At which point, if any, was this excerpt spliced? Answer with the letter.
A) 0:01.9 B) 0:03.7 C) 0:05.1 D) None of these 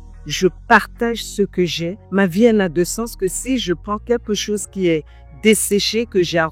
A